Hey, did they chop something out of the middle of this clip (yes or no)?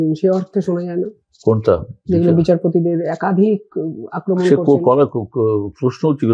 no